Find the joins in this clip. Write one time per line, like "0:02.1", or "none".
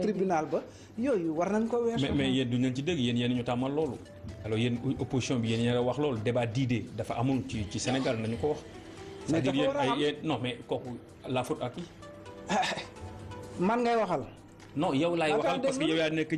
0:04.8